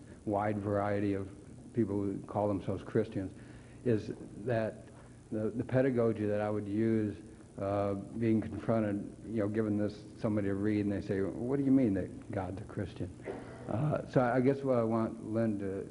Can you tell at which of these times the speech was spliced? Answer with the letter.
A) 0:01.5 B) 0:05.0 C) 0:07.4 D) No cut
A